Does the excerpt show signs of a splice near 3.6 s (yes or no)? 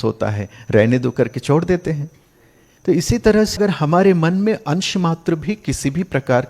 yes